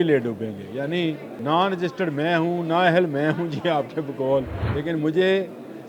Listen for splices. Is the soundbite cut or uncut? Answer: cut